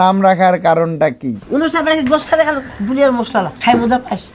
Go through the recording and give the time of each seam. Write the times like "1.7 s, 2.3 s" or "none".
1.3 s, 3.5 s